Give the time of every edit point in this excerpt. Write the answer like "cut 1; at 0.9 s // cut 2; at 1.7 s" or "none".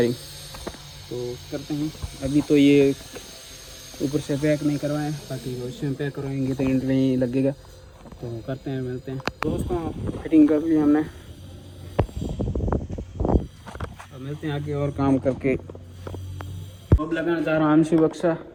none